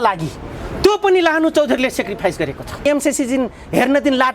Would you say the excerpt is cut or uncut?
cut